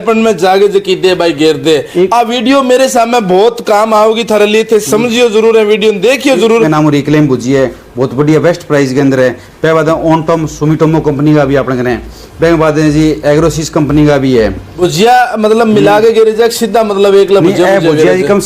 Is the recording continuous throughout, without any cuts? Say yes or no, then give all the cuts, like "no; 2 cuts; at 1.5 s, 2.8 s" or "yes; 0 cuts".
no; 2 cuts; at 6.7 s, 14.7 s